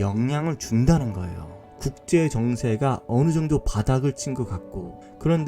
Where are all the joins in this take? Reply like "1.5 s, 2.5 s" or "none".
1.6 s